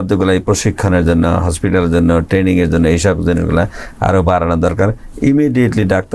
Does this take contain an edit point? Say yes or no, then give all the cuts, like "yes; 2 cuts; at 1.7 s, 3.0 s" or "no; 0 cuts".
no; 0 cuts